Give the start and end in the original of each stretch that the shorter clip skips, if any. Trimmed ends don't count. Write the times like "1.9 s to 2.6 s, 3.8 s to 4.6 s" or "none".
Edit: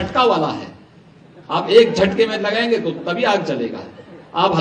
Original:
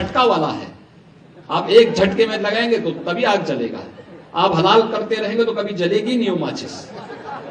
none

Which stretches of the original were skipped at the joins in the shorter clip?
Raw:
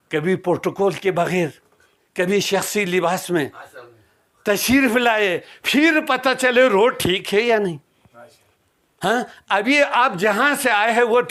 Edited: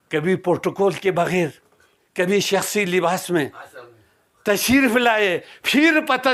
none

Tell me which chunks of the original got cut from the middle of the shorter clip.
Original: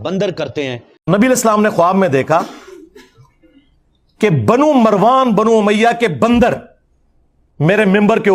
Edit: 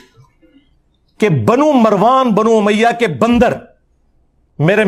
none

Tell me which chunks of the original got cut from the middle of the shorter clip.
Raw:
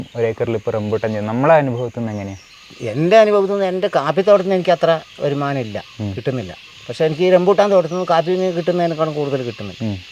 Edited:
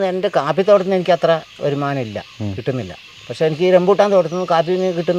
none

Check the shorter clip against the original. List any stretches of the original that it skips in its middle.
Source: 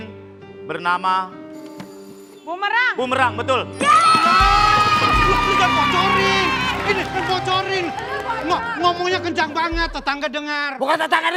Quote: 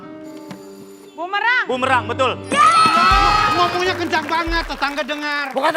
4.8 s to 8.8 s

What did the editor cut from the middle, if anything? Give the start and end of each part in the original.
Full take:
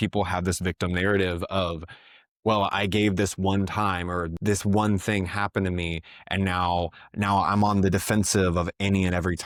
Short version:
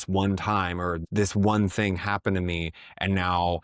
none

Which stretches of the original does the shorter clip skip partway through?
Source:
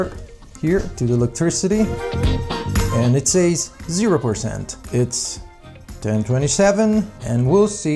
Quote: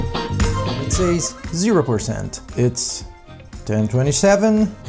none

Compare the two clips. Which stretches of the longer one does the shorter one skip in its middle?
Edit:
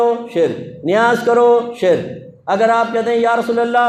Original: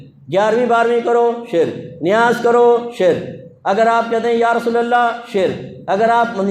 none

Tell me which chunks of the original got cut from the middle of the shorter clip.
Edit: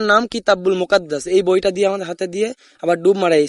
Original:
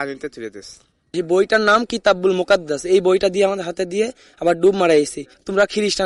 none

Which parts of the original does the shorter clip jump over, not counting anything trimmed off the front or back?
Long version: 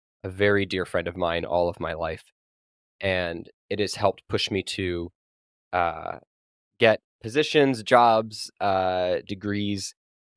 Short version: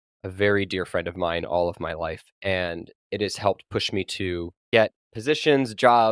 2.3 s to 2.9 s, 5.1 s to 6.6 s

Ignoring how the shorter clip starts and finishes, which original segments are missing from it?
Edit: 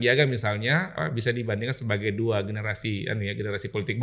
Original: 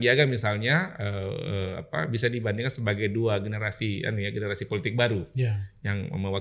0.9 s to 1.9 s

